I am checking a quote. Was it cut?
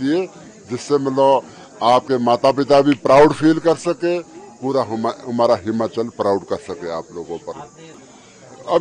no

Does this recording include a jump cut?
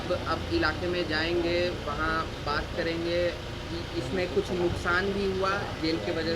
no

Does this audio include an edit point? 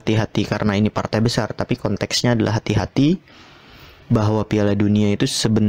no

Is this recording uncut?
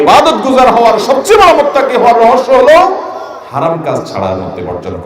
yes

